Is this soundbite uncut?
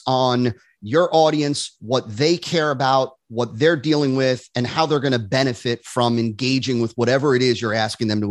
yes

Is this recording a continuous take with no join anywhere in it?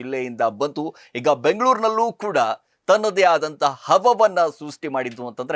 yes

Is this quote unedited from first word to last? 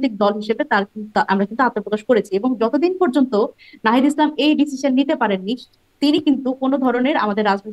yes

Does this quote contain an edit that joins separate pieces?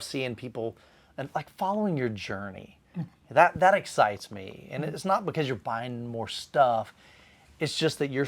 no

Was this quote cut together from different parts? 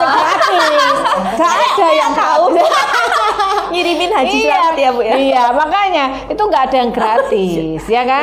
no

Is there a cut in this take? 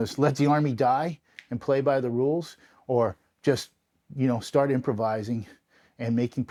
no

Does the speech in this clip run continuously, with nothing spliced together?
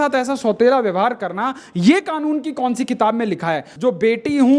no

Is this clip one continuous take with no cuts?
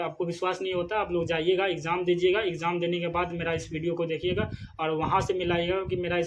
yes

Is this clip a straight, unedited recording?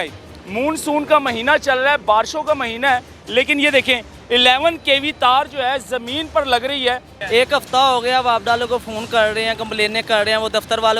no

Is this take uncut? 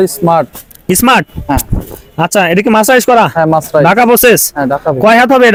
yes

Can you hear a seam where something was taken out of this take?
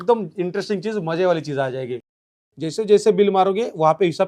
yes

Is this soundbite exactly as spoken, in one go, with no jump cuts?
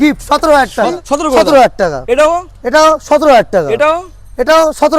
no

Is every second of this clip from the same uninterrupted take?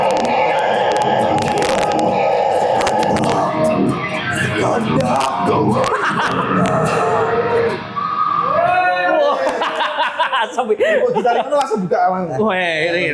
yes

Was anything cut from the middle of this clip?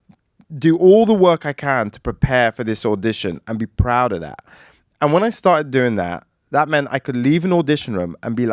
no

